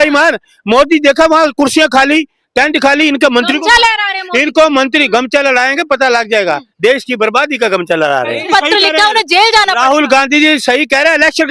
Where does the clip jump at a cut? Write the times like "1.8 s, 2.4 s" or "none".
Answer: 8.5 s